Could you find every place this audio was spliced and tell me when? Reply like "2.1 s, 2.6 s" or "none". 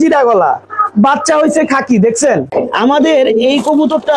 2.5 s